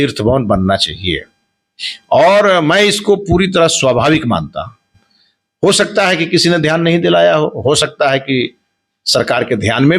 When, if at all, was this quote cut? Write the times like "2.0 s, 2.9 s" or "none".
none